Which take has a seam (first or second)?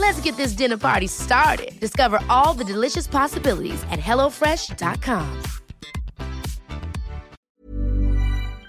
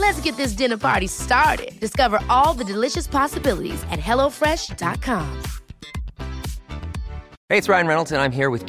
first